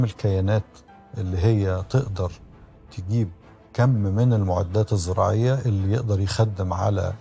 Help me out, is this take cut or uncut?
uncut